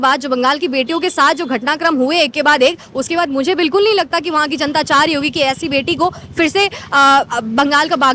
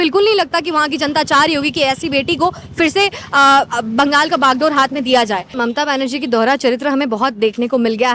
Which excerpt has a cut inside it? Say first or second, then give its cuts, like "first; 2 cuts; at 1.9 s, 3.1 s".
second; 1 cut; at 5.5 s